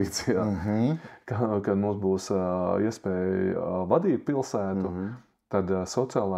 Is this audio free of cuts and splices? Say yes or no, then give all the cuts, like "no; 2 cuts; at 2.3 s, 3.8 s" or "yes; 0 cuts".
no; 1 cut; at 1.0 s